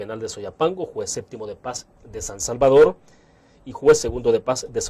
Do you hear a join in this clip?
no; 0 cuts

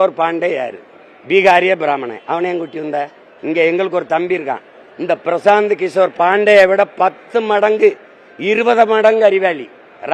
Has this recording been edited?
no; 0 cuts

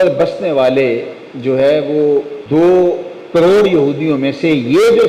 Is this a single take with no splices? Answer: no; 1 cut; at 2.4 s

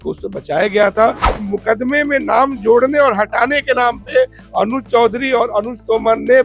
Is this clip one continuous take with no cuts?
no; 1 cut; at 1.3 s

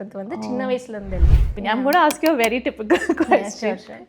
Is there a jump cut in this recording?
yes; 1 cut; at 1.5 s

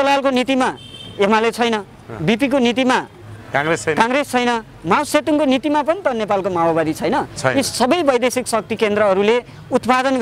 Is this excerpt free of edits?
yes; 0 cuts

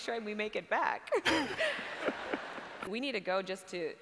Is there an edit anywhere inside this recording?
yes; 1 cut; at 2.8 s

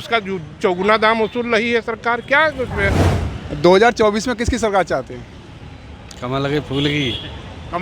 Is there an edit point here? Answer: yes; 1 cut; at 3.1 s

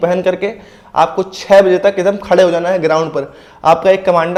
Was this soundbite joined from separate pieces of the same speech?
no; 0 cuts

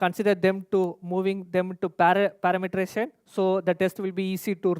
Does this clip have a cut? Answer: no; 0 cuts

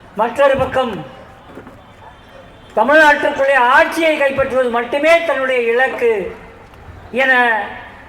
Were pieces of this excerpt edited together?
no; 0 cuts

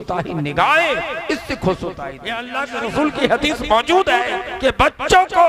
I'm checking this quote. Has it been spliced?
yes; 2 cuts; at 2.5 s, 4.4 s

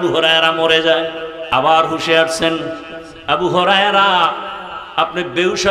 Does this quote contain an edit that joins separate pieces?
yes; 1 cut; at 1.3 s

